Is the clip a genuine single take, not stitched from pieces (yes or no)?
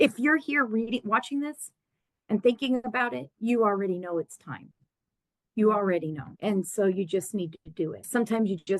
no